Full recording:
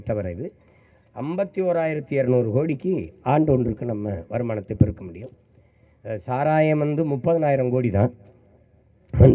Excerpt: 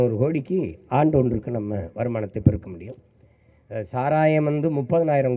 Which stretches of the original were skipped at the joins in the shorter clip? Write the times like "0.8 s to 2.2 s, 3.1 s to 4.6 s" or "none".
none

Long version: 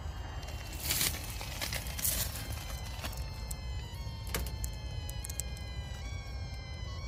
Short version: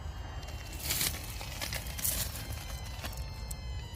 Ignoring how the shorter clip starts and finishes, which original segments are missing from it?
none

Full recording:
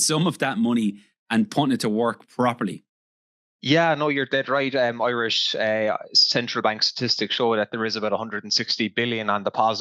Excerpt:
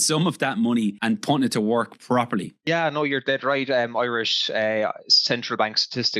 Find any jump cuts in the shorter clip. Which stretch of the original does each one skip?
1.0 s to 1.3 s, 2.9 s to 3.7 s

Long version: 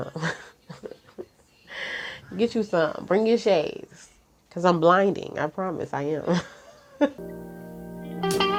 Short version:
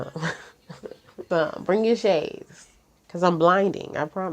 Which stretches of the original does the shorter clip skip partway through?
1.3 s to 2.7 s

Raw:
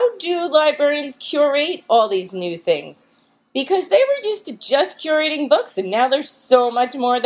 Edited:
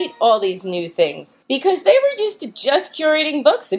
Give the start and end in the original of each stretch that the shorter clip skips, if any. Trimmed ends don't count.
3.0 s to 3.3 s

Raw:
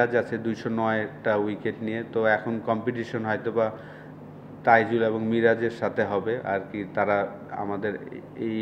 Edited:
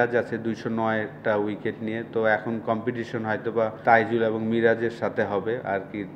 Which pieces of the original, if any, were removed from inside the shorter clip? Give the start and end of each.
3.8 s to 4.6 s

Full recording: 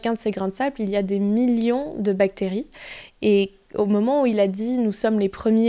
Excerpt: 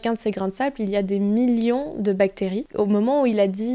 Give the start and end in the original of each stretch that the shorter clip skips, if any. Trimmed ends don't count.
2.6 s to 3.6 s

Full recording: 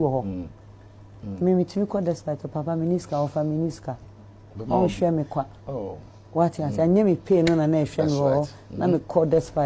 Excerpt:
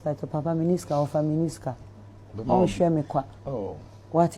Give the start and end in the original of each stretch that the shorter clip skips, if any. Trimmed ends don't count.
none

